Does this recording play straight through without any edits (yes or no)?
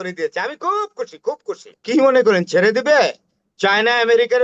no